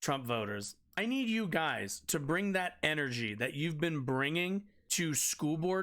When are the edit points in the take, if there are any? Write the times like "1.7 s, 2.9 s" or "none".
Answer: 0.9 s, 4.8 s